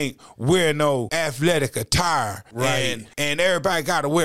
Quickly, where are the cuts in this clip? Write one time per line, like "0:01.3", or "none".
0:01.1
0:02.7